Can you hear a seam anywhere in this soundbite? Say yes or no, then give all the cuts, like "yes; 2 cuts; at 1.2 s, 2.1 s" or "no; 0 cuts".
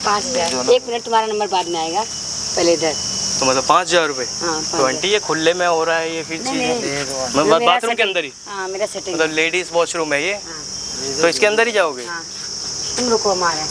no; 0 cuts